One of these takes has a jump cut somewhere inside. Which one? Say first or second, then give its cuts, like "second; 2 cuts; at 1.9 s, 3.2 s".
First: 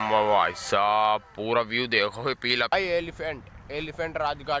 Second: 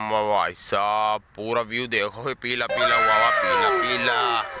first; 1 cut; at 2.7 s